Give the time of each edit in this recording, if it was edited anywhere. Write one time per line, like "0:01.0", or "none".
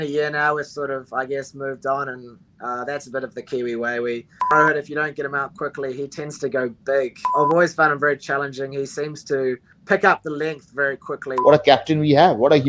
0:04.5
0:07.3
0:09.7
0:11.3